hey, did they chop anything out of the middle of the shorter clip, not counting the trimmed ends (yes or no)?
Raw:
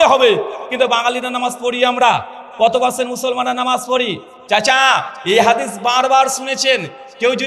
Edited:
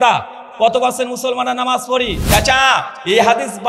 yes